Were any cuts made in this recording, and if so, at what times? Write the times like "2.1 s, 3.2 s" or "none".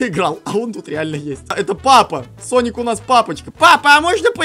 1.4 s, 3.4 s